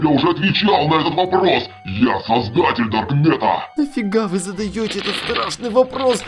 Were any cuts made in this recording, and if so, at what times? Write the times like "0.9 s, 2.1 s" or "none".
3.7 s